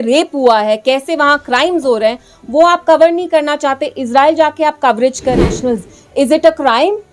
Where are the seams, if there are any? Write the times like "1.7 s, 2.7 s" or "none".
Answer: 5.4 s